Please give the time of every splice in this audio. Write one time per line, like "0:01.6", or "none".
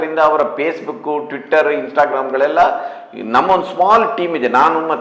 none